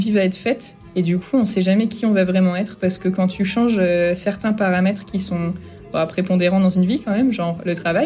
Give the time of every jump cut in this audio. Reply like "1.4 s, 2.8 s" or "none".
none